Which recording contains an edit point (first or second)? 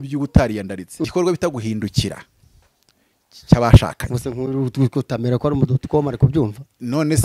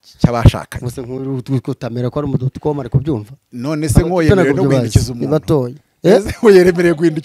first